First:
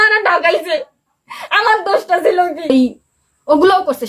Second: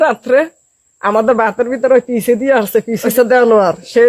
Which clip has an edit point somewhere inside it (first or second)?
first